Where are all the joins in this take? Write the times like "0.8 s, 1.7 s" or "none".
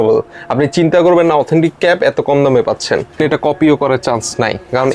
3.2 s